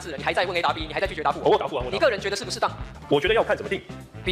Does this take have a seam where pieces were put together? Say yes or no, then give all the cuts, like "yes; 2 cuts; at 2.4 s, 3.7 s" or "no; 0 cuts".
yes; 1 cut; at 2.9 s